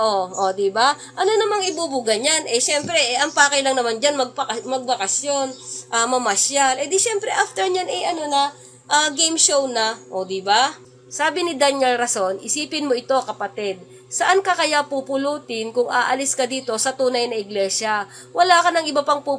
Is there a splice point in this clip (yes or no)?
no